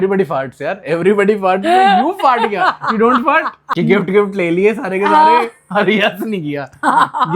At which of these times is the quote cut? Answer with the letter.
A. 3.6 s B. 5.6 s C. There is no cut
A